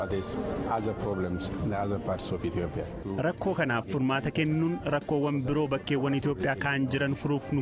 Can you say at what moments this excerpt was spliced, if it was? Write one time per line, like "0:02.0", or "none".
0:03.0

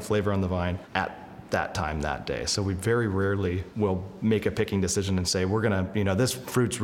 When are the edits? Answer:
0:00.8
0:03.7

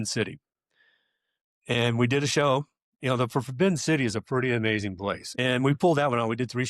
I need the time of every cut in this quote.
0:05.3

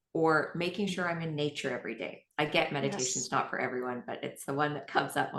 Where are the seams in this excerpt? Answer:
none

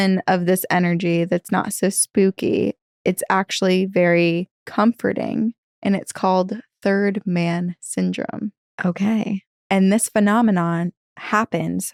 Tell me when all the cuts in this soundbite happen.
none

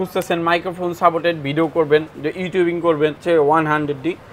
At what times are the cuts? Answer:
0:03.2

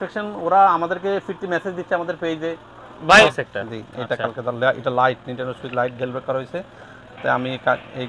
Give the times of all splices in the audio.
0:03.3

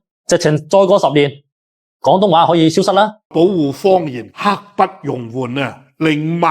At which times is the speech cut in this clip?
0:03.3

